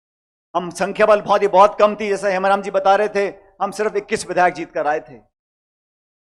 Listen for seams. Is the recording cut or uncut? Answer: uncut